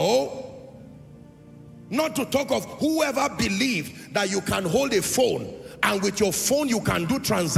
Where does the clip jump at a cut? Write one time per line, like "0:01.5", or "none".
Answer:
none